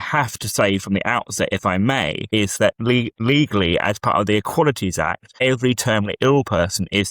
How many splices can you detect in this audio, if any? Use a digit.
3